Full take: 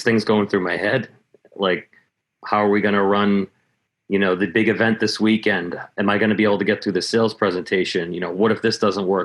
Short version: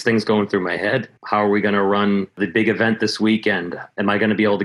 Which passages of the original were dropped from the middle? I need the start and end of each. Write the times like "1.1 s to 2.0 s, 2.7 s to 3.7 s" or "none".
1.1 s to 2.3 s, 3.6 s to 4.4 s